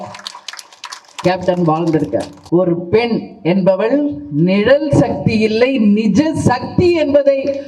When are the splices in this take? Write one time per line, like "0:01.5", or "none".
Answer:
0:02.4